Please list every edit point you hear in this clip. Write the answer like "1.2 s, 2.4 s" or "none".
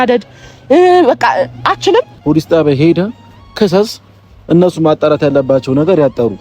2.1 s